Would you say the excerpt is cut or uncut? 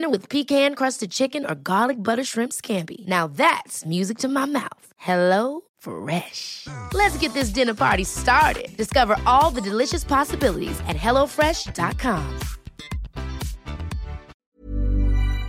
cut